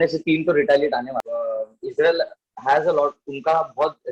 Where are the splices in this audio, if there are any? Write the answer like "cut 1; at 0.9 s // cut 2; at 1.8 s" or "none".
cut 1; at 1.2 s